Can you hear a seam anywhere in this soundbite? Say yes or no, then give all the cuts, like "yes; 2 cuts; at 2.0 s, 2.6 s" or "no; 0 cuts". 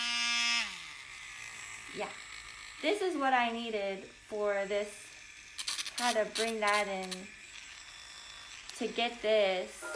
no; 0 cuts